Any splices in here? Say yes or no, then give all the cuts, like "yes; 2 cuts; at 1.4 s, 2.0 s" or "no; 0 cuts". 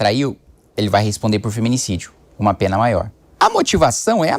yes; 1 cut; at 3.2 s